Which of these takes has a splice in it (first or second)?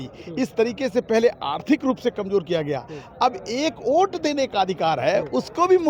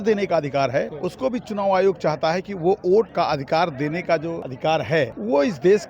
second